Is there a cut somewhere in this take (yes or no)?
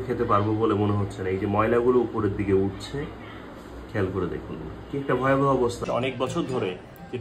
yes